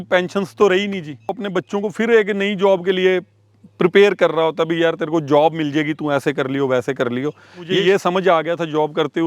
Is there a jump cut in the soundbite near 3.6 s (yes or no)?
no